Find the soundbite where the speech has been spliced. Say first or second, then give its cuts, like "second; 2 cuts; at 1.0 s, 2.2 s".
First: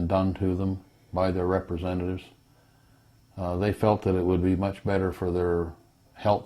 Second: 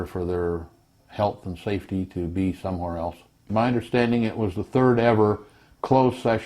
second; 1 cut; at 3.5 s